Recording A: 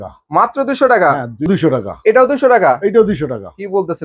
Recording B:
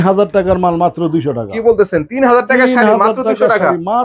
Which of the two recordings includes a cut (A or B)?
A